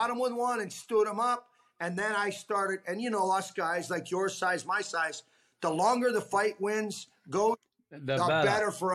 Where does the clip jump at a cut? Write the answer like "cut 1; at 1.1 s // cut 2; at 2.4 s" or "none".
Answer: none